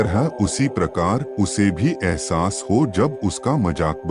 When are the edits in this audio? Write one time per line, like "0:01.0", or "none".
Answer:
none